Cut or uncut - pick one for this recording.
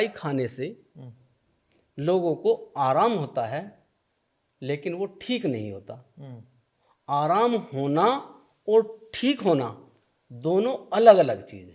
uncut